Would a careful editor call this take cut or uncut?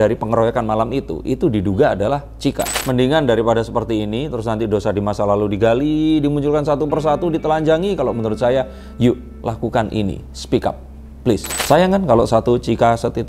cut